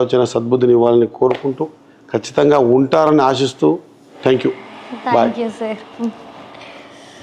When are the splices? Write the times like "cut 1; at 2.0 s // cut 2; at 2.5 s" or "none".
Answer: none